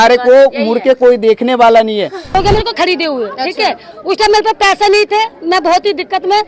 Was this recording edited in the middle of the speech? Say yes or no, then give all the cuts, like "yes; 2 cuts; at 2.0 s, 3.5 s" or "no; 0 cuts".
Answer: yes; 1 cut; at 2.3 s